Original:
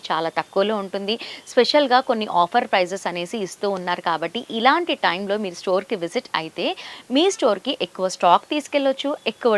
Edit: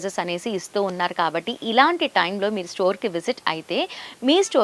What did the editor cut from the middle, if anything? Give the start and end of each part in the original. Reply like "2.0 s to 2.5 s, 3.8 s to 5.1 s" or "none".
none

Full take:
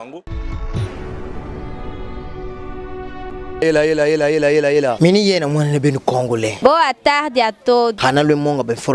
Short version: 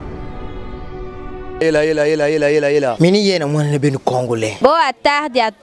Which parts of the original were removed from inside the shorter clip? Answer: 2.9 s to 3.4 s

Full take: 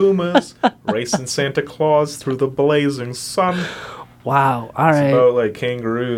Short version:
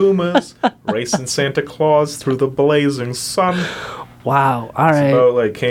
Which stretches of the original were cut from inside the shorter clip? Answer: none

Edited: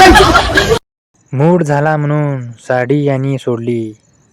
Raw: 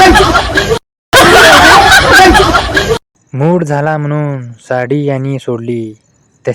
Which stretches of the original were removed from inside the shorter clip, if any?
1.0 s to 3.0 s

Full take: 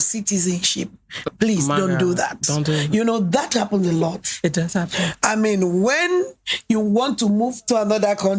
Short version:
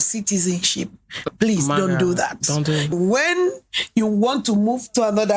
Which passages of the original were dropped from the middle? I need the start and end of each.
2.9 s to 5.7 s

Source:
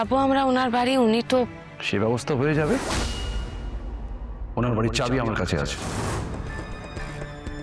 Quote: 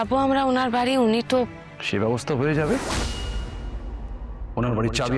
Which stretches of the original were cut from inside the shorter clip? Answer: none

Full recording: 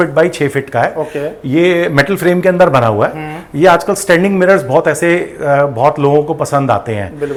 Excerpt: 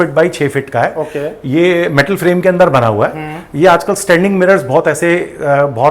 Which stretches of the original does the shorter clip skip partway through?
none

